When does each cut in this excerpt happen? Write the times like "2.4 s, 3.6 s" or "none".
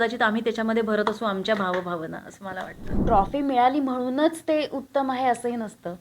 3.0 s